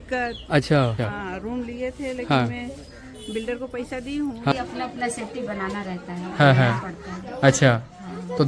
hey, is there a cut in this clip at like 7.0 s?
no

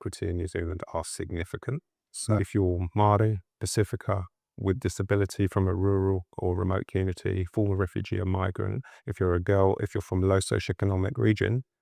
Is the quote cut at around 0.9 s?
no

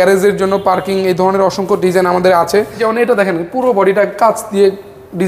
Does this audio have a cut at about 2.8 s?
yes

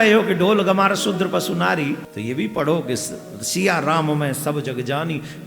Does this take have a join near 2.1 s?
yes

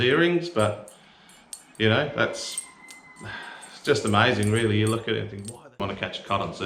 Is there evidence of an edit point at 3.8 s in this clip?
no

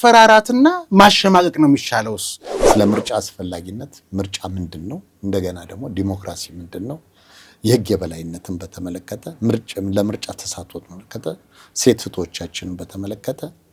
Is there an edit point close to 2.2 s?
yes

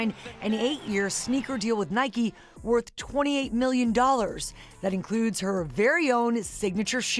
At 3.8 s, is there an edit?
no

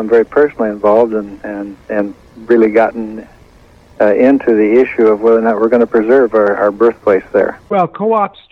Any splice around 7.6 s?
yes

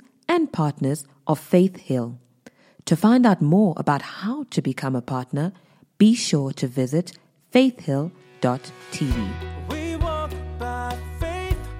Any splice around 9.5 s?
yes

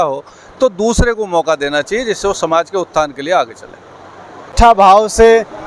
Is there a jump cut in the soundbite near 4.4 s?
yes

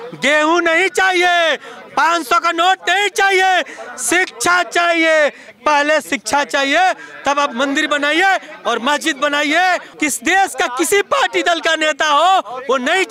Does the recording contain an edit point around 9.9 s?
yes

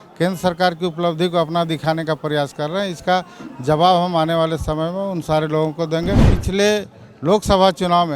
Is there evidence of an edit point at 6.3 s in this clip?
yes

